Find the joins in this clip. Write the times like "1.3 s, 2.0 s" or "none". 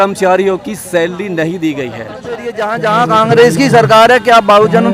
2.5 s